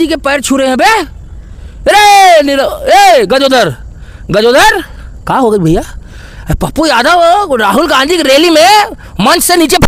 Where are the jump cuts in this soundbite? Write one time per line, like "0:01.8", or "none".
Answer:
none